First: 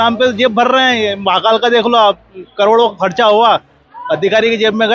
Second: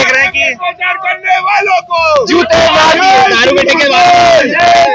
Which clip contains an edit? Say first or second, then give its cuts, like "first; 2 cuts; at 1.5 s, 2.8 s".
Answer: second; 1 cut; at 2.9 s